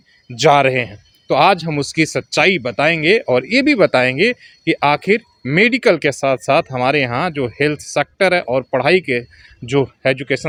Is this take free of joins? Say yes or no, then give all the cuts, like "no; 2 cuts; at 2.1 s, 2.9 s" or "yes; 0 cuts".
yes; 0 cuts